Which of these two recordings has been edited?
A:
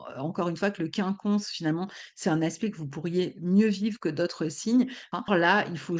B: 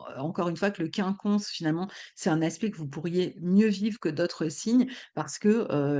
A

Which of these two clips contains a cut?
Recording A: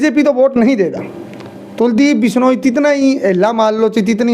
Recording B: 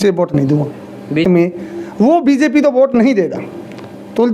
B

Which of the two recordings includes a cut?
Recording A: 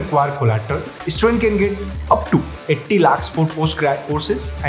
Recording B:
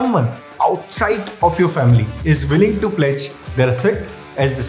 A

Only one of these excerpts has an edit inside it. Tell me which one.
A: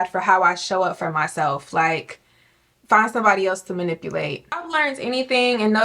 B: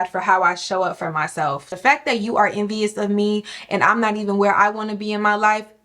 B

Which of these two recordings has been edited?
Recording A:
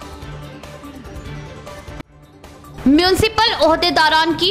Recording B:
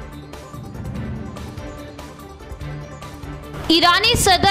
B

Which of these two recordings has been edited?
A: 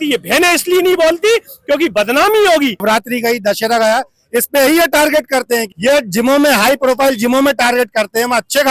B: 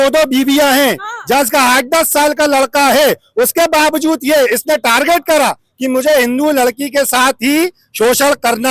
A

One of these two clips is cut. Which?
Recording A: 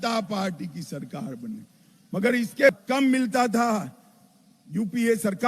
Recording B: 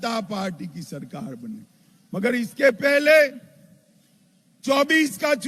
A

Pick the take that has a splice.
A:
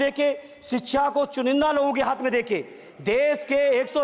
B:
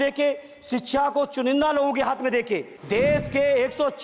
B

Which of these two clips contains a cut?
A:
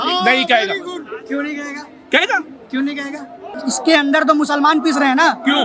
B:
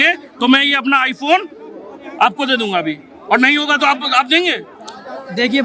A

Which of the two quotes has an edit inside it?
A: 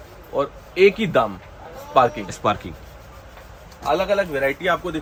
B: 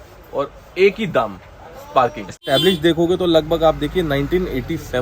B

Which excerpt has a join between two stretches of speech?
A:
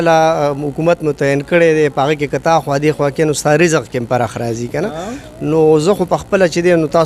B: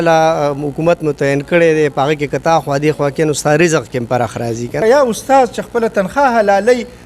B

